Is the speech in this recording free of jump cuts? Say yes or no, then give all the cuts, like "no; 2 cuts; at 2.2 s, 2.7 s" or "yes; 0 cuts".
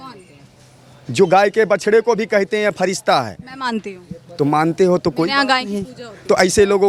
yes; 0 cuts